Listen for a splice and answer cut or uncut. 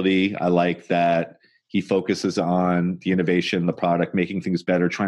uncut